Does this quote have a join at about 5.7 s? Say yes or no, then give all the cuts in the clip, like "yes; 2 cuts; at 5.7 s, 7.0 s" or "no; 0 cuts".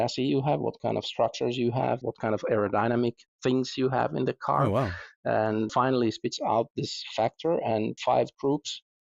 yes; 3 cuts; at 2.0 s, 5.7 s, 8.0 s